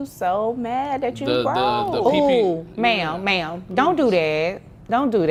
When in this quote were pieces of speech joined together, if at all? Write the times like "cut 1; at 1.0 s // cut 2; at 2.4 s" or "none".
none